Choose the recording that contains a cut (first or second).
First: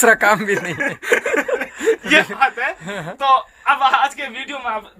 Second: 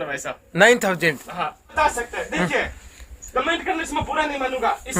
second